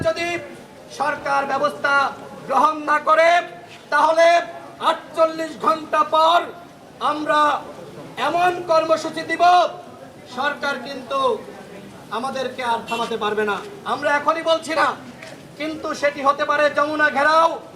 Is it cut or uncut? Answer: uncut